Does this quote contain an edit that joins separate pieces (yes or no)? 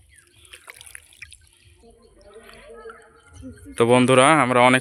no